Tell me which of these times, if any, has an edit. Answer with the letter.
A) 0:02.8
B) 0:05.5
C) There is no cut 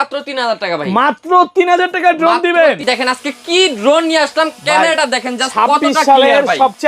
A